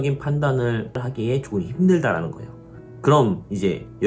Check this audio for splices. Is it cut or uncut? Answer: cut